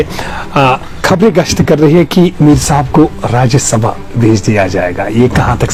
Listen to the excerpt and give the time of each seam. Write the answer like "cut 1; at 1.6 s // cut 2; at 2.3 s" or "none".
none